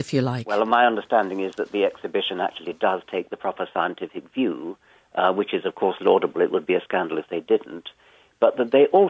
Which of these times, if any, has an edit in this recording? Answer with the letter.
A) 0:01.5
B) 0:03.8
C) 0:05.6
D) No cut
C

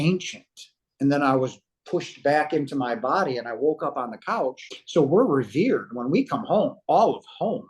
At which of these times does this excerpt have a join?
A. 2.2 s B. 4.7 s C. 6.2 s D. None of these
B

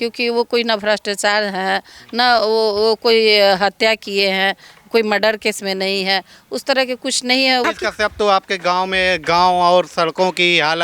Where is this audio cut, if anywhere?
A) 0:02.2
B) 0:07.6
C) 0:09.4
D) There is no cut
B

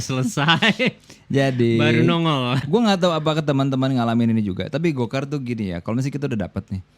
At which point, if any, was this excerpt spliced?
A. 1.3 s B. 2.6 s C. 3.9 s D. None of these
B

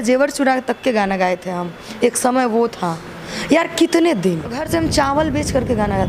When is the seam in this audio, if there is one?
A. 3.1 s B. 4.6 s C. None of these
B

